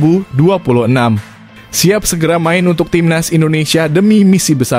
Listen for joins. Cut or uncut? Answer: uncut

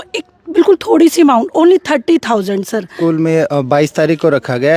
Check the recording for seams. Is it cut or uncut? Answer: cut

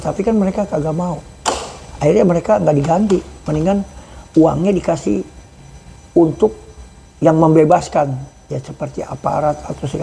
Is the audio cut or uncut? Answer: uncut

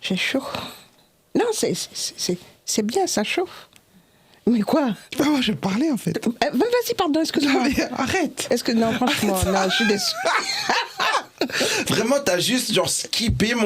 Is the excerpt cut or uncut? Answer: uncut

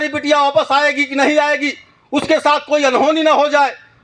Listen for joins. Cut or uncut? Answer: uncut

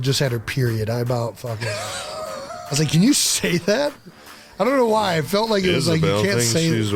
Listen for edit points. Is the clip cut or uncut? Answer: uncut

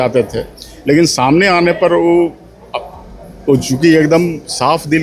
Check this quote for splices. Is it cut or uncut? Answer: uncut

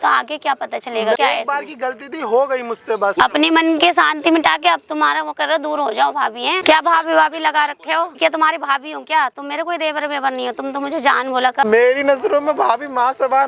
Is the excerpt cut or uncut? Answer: cut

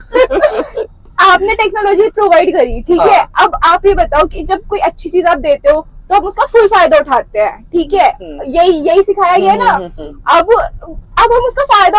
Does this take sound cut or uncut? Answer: uncut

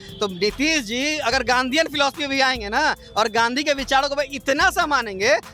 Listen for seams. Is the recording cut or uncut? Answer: uncut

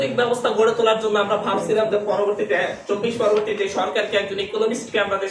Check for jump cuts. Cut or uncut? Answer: uncut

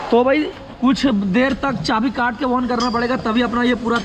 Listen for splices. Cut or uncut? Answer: uncut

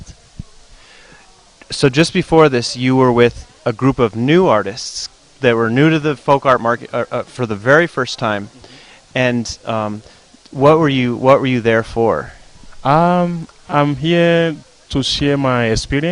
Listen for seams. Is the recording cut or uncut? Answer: cut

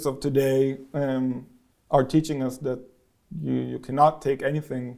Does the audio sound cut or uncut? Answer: uncut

